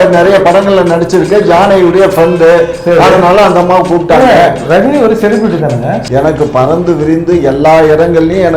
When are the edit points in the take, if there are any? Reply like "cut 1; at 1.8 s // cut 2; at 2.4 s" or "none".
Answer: cut 1; at 6.0 s